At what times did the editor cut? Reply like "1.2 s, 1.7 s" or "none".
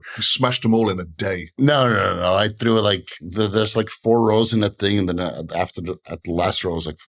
none

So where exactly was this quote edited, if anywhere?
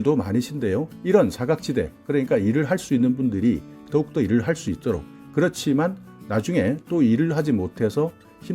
0.9 s

